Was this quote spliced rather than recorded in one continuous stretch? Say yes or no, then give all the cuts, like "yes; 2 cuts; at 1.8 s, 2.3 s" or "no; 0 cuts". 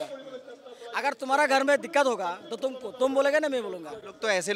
no; 0 cuts